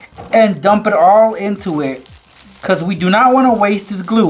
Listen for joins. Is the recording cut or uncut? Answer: uncut